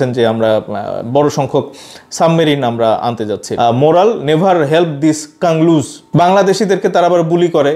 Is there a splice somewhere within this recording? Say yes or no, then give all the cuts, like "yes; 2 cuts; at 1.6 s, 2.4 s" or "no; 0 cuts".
yes; 1 cut; at 3.4 s